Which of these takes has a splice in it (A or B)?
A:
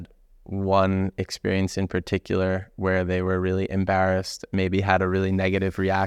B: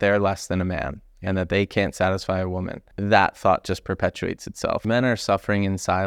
B